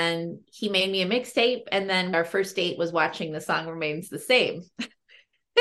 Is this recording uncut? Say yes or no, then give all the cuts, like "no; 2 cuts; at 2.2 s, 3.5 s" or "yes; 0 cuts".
no; 1 cut; at 2.1 s